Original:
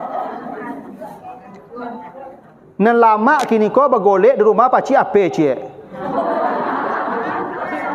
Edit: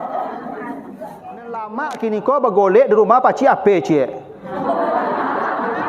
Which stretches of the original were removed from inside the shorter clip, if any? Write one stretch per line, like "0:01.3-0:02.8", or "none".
0:01.7-0:03.1